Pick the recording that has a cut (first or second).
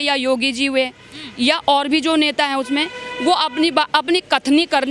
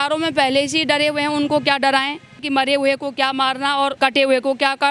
second